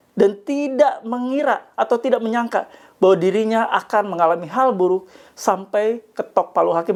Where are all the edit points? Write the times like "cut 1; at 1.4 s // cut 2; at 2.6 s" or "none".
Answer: none

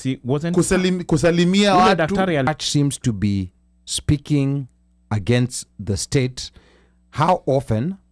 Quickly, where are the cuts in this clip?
cut 1; at 2.5 s

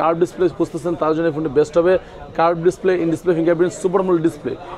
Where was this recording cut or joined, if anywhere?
none

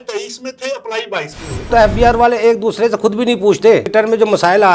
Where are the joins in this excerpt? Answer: cut 1; at 1.7 s // cut 2; at 3.8 s

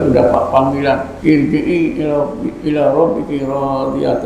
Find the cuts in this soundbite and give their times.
cut 1; at 1.1 s

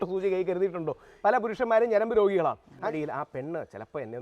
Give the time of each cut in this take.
cut 1; at 1.4 s // cut 2; at 2.9 s

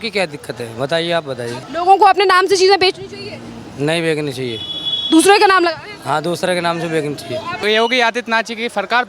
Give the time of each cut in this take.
cut 1; at 1.6 s // cut 2; at 7.5 s

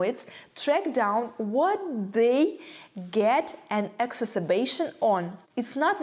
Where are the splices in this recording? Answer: none

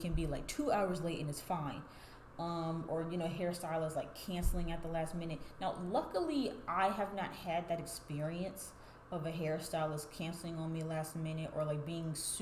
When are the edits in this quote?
none

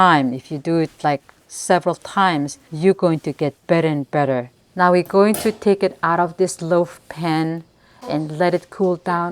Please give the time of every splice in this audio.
cut 1; at 2.6 s // cut 2; at 4.5 s

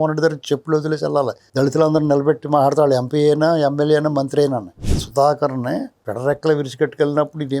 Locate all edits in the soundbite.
cut 1; at 4.8 s

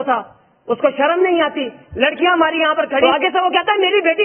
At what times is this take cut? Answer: cut 1; at 3.0 s

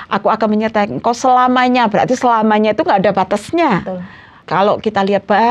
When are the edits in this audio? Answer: cut 1; at 4.4 s

